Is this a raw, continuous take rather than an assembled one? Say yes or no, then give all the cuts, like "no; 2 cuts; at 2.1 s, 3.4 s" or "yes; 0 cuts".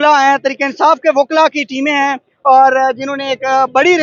yes; 0 cuts